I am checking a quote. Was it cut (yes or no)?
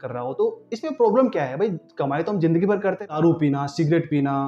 yes